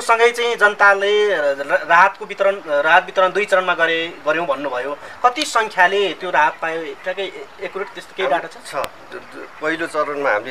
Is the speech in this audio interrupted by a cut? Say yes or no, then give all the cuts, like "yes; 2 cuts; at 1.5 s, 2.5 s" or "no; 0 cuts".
no; 0 cuts